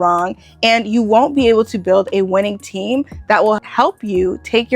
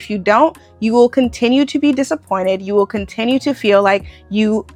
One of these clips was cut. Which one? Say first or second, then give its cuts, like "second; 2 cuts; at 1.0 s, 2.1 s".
first; 1 cut; at 3.7 s